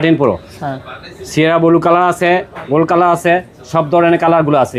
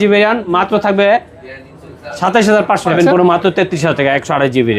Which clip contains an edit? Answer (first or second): second